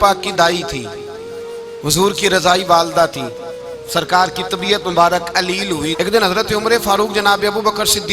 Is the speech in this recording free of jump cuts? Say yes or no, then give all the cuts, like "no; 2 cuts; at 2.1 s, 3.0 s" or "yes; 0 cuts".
no; 1 cut; at 5.9 s